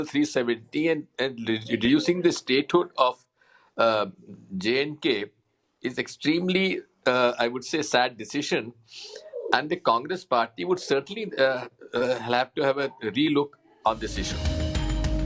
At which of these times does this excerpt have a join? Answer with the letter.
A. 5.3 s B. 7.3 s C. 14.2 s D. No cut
C